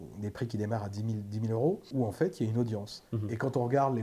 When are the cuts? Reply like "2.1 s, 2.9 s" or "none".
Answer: 1.9 s

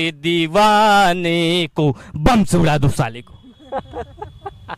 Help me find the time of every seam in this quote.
none

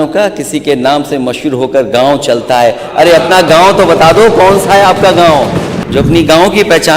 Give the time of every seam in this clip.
5.8 s

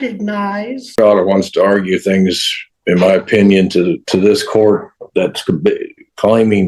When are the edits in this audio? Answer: 0.9 s

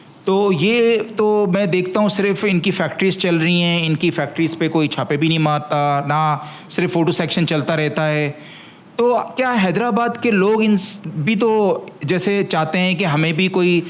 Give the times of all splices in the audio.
none

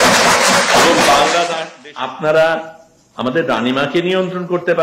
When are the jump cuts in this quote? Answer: 1.6 s

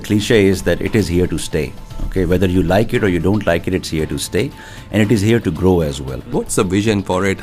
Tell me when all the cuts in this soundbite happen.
6.2 s

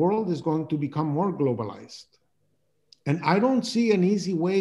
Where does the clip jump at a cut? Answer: none

